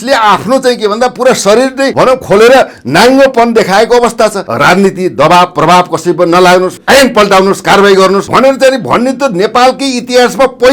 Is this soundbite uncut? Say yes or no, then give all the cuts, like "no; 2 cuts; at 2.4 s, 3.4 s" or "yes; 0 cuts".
no; 4 cuts; at 1.9 s, 4.5 s, 6.8 s, 8.3 s